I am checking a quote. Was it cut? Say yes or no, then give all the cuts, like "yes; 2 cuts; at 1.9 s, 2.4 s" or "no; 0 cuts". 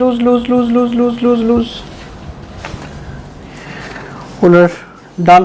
no; 0 cuts